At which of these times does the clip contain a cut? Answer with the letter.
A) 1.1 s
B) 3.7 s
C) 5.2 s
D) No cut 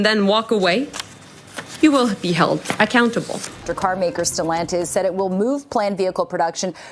B